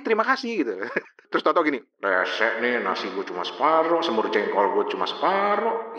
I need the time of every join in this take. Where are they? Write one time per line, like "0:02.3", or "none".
none